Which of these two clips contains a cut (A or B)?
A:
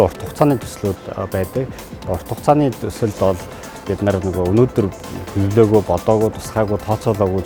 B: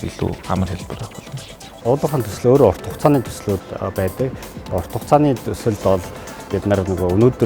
B